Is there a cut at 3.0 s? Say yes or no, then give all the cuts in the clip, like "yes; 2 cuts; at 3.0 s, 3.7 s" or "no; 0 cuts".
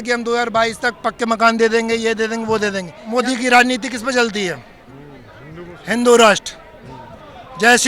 yes; 1 cut; at 3.0 s